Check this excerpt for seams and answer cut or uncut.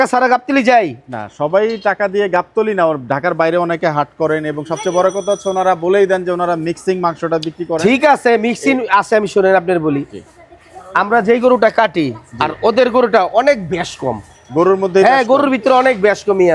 uncut